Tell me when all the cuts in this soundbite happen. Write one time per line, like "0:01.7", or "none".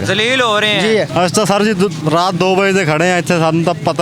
0:01.1